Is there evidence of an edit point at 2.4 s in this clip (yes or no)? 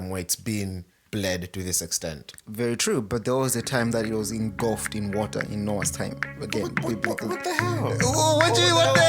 no